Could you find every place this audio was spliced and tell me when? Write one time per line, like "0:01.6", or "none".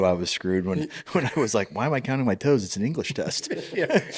none